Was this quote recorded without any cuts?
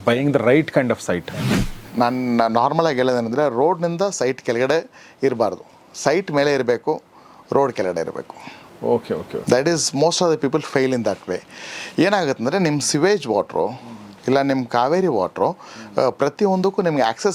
no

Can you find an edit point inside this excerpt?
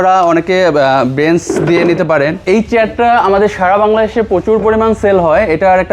yes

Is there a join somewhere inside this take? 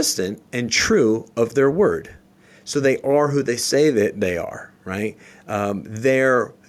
no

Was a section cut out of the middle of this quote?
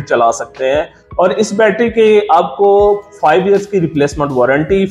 yes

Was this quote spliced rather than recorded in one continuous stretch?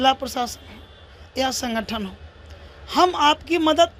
no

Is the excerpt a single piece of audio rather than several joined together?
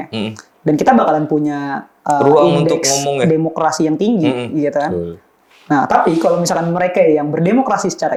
yes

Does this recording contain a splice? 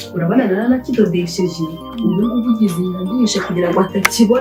no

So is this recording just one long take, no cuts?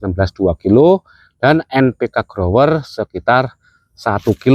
yes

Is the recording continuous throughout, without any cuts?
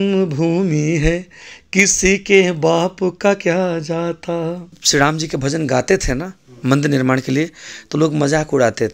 no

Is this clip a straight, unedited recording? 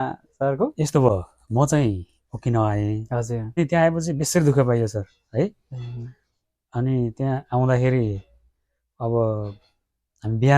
no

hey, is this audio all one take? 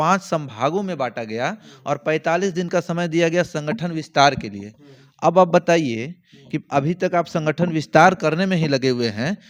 yes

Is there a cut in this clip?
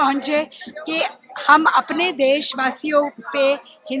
no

